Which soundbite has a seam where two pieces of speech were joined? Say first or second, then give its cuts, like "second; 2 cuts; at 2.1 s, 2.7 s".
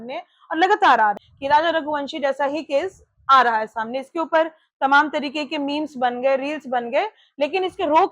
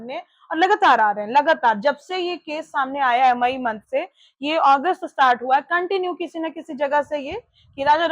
first; 1 cut; at 1.2 s